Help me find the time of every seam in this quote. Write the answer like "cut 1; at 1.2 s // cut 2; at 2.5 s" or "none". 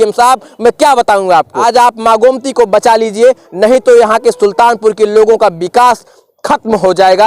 cut 1; at 1.5 s